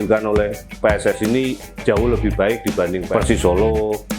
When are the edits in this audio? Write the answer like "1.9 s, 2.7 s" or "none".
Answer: 3.1 s